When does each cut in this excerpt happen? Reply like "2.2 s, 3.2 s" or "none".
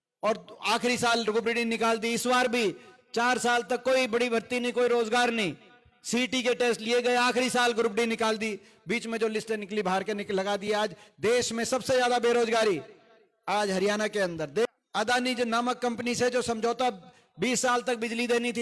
14.7 s